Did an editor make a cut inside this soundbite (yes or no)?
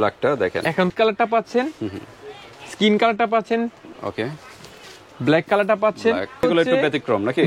yes